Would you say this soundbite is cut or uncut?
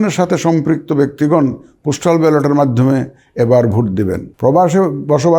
cut